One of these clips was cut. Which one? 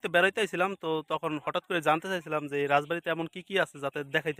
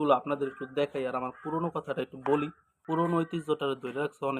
second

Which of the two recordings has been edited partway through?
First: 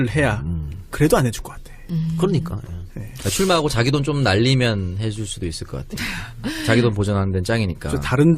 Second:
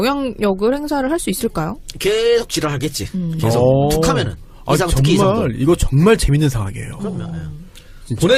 first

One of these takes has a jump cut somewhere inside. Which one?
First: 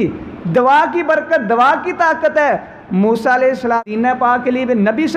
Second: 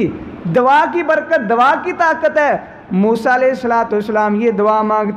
first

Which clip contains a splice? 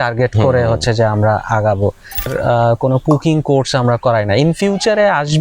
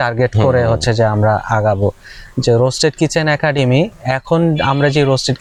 first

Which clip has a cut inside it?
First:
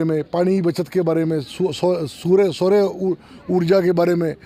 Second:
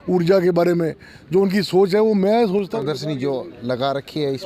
second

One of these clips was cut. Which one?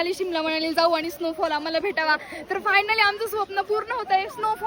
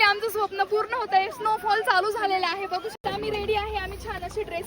second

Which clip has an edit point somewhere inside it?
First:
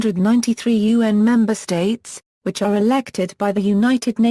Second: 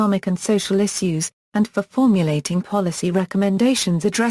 second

